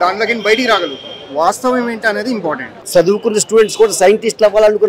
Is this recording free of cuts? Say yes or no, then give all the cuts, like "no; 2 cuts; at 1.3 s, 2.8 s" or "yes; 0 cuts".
no; 1 cut; at 2.8 s